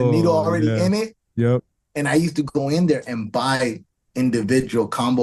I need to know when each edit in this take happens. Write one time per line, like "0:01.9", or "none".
none